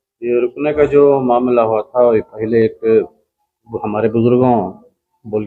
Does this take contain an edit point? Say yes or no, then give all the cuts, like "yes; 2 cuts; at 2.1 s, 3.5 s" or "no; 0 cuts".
no; 0 cuts